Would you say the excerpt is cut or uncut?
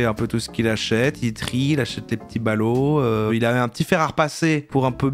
cut